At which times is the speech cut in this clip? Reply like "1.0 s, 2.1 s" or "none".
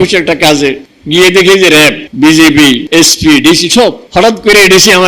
0.9 s, 2.0 s, 2.8 s, 4.0 s